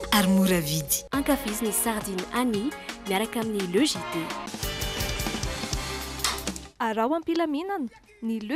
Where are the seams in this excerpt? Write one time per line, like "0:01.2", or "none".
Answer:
none